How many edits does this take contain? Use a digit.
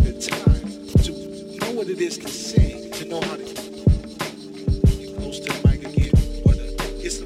0